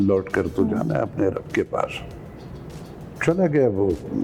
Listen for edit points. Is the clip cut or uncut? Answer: uncut